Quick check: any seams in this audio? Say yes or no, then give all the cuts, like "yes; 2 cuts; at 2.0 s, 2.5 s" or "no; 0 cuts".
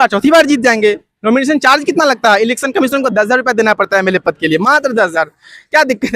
no; 0 cuts